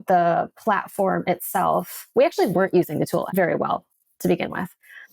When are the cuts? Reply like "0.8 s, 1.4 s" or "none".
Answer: 3.3 s